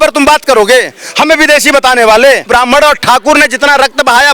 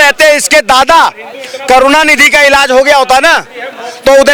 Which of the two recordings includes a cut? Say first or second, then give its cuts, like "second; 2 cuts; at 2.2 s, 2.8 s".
first; 1 cut; at 2.4 s